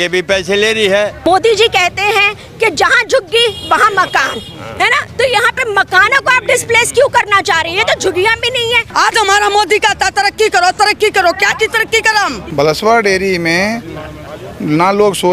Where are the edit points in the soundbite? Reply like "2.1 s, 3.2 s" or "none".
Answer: 1.3 s, 8.8 s, 12.5 s